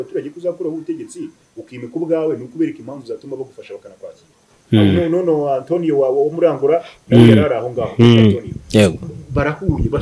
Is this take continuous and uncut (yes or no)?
no